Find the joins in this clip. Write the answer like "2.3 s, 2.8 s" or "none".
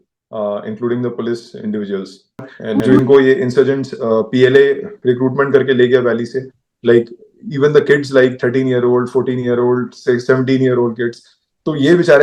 2.8 s